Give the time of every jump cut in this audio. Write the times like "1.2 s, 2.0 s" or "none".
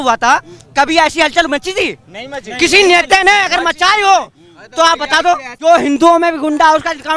5.5 s